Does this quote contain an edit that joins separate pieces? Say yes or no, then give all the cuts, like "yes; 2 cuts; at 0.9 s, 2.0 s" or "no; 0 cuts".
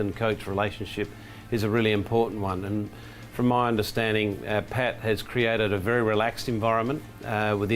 no; 0 cuts